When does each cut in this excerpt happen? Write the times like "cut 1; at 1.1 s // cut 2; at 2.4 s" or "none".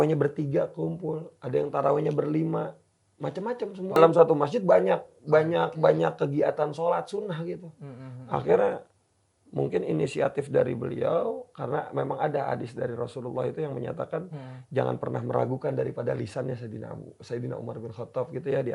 cut 1; at 4.0 s